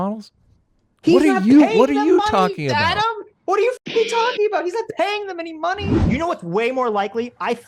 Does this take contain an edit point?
yes; 1 cut; at 6.0 s

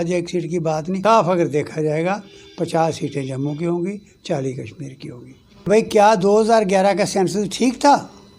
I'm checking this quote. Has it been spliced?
yes; 2 cuts; at 1.0 s, 5.7 s

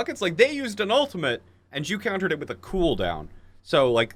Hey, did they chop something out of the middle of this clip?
no; 0 cuts

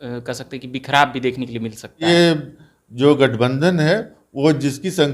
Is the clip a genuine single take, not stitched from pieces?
no; 1 cut; at 2.0 s

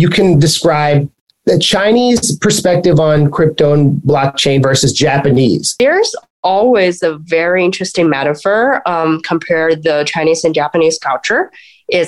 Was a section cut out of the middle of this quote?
no; 0 cuts

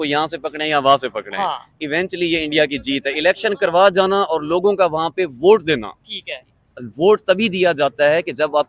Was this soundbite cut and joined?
no; 0 cuts

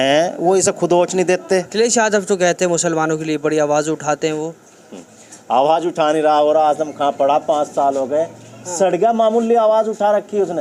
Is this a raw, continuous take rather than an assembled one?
no; 1 cut; at 1.7 s

